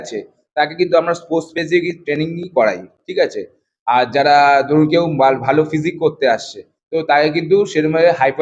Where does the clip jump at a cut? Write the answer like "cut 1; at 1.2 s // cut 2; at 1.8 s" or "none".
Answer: none